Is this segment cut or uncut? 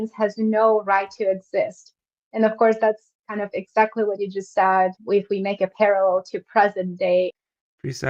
uncut